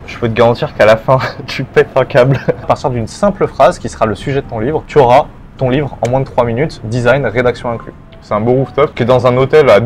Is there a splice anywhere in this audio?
yes; 4 cuts; at 2.7 s, 4.8 s, 8.1 s, 8.9 s

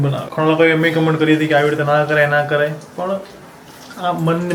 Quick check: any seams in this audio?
no; 0 cuts

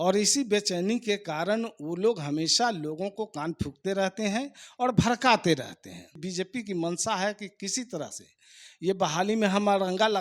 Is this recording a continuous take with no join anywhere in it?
no; 1 cut; at 6.2 s

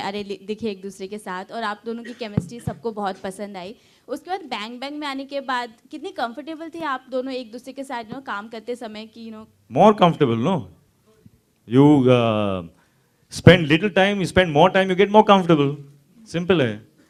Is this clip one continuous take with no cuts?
yes; 0 cuts

